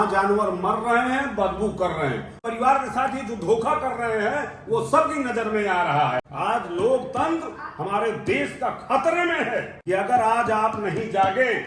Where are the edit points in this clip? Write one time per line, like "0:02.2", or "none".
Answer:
0:02.4
0:06.3
0:09.7